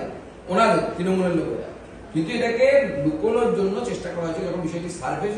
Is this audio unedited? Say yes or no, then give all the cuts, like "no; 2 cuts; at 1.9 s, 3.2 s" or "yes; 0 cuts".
yes; 0 cuts